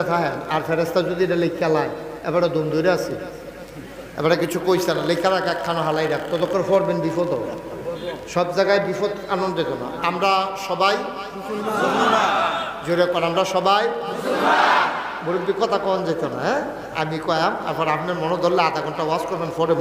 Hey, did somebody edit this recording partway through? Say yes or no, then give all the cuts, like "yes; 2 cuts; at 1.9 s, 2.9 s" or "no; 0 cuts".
no; 0 cuts